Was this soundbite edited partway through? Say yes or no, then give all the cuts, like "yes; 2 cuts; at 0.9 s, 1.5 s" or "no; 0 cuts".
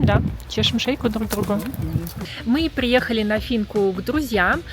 yes; 1 cut; at 2.2 s